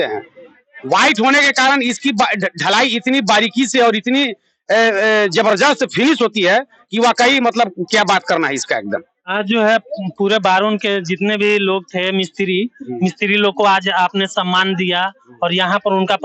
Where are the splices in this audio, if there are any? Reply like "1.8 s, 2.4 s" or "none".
none